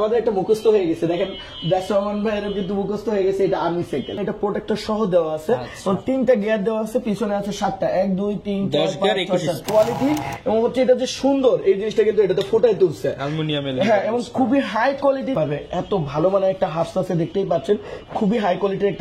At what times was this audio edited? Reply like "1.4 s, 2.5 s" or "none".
4.2 s, 9.6 s, 15.4 s